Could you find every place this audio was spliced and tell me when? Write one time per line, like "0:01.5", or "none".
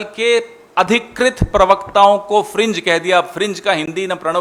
none